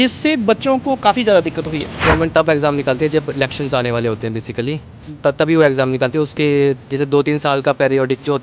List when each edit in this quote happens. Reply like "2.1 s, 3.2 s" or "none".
2.0 s